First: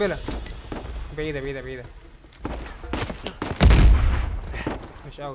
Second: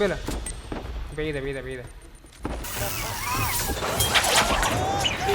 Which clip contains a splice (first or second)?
second